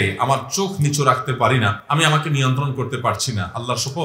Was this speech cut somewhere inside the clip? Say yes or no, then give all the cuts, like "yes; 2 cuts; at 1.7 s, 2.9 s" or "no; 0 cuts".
yes; 1 cut; at 1.8 s